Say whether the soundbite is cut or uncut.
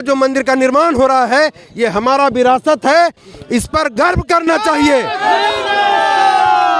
uncut